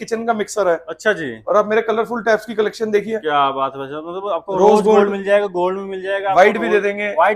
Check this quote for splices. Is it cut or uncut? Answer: uncut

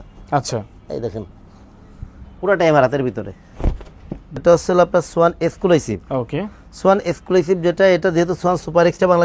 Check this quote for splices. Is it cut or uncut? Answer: cut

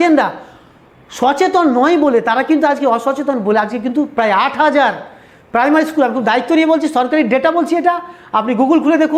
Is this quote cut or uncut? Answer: uncut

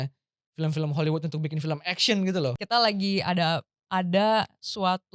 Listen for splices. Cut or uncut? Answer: cut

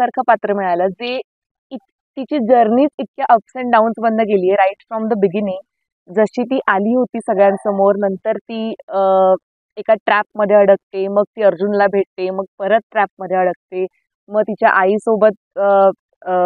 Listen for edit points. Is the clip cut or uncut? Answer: uncut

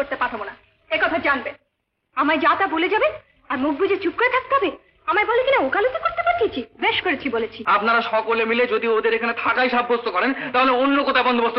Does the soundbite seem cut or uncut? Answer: cut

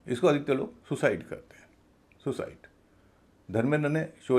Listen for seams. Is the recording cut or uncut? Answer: uncut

